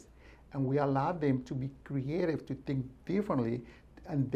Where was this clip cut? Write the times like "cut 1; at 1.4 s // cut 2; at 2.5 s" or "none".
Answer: none